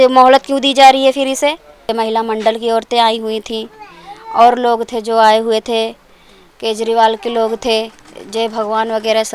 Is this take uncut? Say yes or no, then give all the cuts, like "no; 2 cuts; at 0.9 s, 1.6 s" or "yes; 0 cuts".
no; 1 cut; at 1.8 s